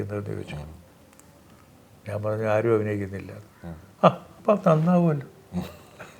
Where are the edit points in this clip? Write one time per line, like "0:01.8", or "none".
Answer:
none